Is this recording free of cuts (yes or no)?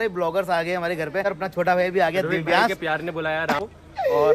no